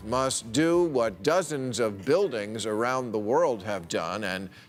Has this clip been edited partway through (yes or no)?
no